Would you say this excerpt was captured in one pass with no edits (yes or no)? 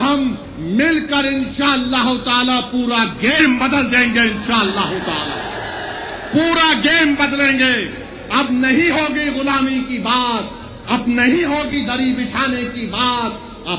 yes